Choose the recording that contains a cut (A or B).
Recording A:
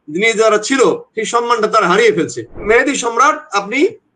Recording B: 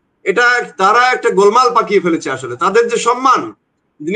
A